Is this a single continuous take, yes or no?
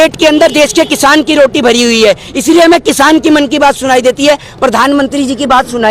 yes